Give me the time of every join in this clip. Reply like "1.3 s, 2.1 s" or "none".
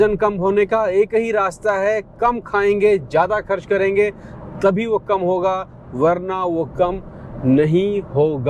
none